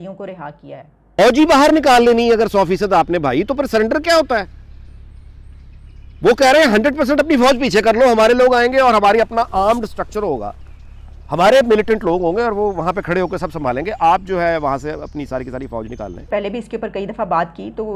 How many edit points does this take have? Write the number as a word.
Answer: two